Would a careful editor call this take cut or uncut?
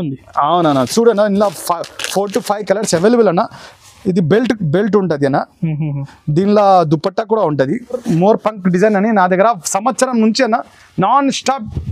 cut